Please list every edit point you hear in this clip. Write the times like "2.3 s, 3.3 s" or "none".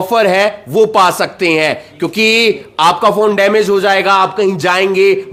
none